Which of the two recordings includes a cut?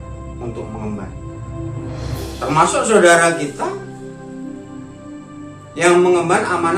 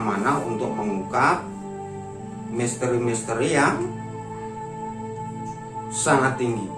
first; 2 cuts; at 3.9 s, 5.7 s

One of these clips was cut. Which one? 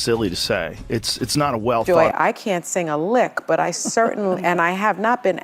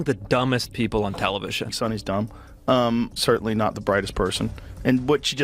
first; 1 cut; at 1.8 s

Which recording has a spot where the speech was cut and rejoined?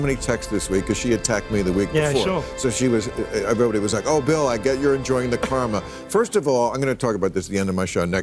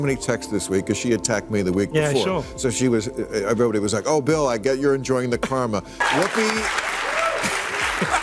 second; 1 cut; at 6.0 s

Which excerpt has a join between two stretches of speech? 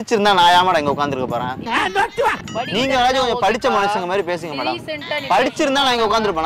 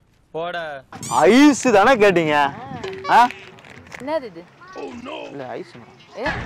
second; 1 cut; at 0.9 s

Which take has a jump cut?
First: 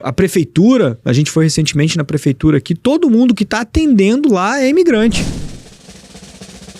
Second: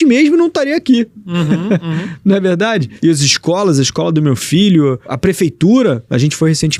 first; 1 cut; at 5.2 s

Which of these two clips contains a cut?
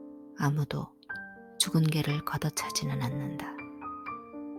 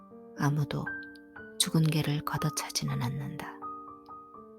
second; 1 cut; at 3.5 s

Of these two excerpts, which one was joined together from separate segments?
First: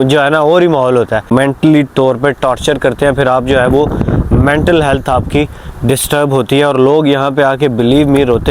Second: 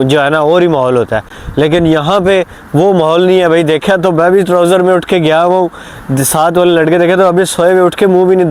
first; 1 cut; at 1.3 s

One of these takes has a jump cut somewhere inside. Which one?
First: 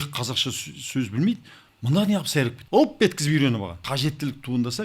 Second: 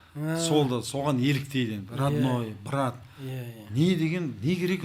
first; 2 cuts; at 2.6 s, 3.8 s

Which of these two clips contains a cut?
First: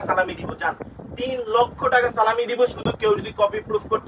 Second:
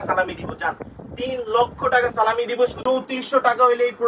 second; 1 cut; at 2.8 s

